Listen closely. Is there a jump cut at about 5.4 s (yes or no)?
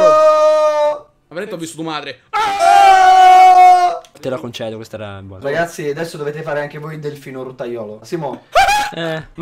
yes